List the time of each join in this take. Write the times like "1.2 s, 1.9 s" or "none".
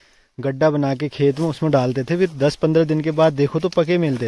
none